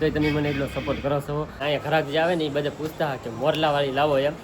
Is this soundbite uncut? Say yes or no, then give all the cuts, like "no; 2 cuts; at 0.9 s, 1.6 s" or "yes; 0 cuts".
no; 1 cut; at 1.6 s